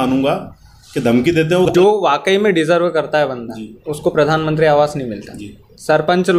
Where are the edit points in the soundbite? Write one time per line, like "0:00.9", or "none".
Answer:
0:01.7